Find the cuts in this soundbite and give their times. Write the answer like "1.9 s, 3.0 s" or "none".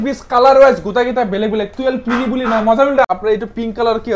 3.0 s